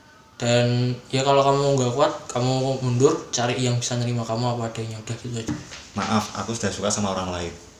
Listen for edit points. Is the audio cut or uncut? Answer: cut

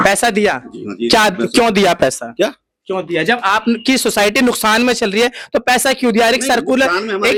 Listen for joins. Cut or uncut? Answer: uncut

